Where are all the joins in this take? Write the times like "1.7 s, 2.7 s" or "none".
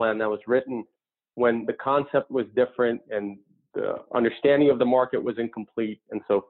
3.0 s